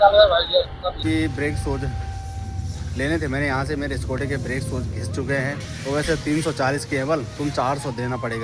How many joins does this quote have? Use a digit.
2